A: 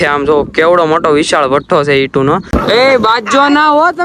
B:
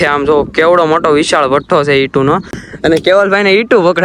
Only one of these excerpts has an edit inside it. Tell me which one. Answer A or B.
A